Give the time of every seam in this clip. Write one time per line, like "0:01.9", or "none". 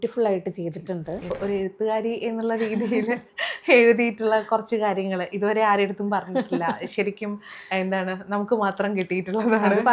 0:01.3